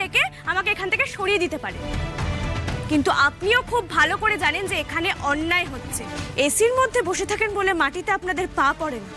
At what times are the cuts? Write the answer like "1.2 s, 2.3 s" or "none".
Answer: 2.8 s, 6.0 s